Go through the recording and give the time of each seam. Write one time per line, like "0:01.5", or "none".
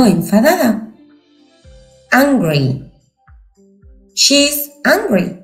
none